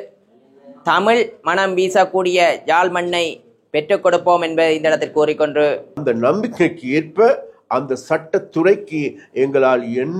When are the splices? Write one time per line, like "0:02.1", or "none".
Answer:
0:06.0